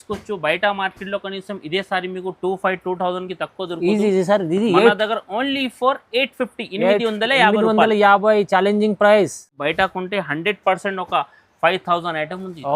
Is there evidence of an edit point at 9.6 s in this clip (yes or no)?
yes